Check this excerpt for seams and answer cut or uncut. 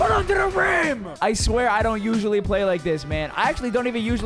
cut